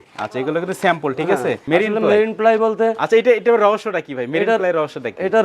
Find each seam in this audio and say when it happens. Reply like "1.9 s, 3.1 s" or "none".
1.6 s